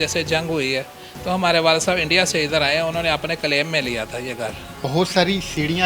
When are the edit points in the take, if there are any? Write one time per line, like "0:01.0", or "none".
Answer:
0:04.8